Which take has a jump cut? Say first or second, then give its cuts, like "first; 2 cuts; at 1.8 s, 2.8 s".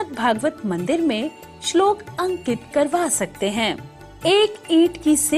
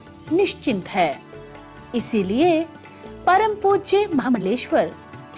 second; 2 cuts; at 1.0 s, 4.3 s